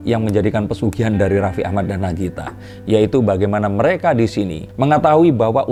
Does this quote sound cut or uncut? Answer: uncut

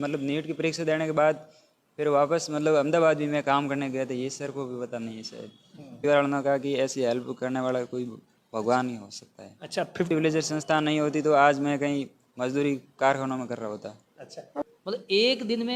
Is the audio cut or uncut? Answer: cut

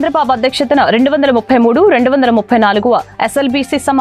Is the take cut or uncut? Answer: uncut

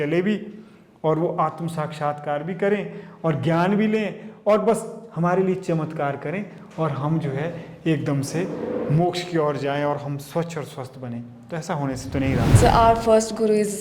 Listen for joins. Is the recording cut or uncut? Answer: cut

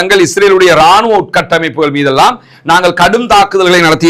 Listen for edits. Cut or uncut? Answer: uncut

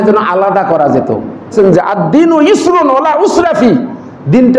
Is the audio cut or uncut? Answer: cut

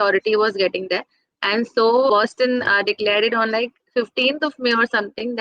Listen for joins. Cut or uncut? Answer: cut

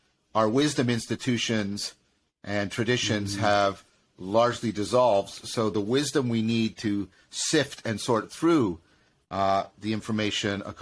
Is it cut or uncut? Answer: uncut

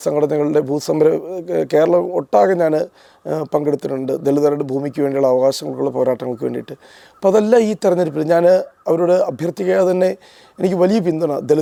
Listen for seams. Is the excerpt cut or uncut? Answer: uncut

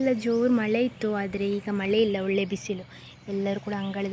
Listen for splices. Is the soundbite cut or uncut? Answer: uncut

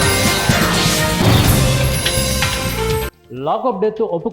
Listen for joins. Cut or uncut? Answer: cut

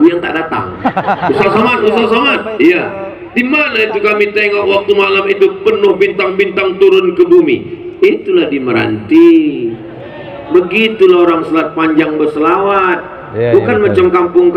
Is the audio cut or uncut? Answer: cut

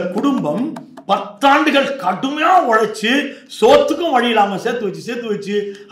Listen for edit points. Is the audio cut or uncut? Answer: uncut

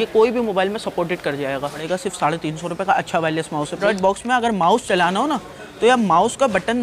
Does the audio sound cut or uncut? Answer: cut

